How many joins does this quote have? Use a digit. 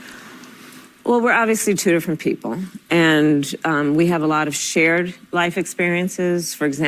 0